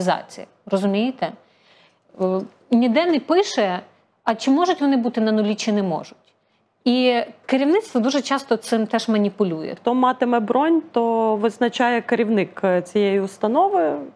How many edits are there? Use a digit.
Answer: 1